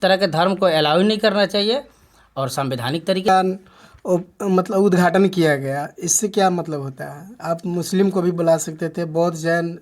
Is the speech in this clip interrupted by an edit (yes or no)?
yes